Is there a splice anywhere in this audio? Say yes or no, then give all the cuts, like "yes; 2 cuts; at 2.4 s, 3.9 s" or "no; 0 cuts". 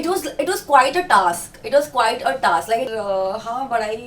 yes; 1 cut; at 2.9 s